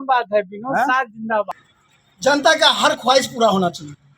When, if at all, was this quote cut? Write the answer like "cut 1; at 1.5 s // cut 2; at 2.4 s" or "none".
cut 1; at 1.5 s